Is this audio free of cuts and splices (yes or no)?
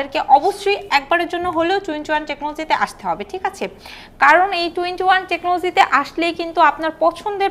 yes